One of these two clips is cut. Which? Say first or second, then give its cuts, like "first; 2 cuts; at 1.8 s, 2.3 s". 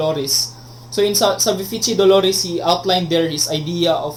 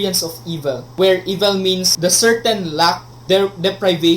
second; 3 cuts; at 0.9 s, 1.9 s, 3.1 s